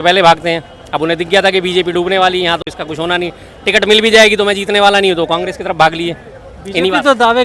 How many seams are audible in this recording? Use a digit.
0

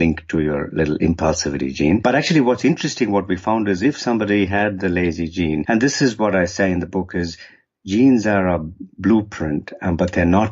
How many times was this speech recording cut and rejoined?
2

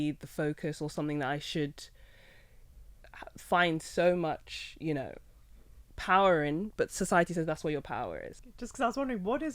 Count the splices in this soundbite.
1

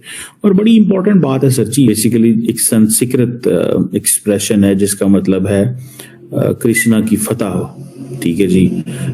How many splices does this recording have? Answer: 1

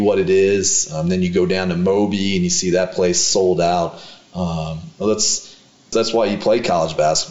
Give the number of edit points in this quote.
1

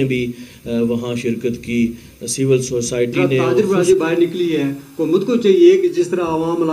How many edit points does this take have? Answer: 1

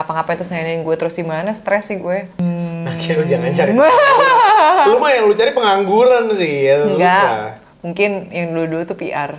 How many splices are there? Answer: 1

